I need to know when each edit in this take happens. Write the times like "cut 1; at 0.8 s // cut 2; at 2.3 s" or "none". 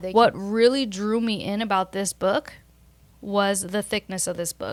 none